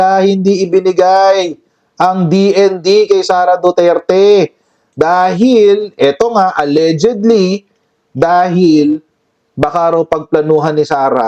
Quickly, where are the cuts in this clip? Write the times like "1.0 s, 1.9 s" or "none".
none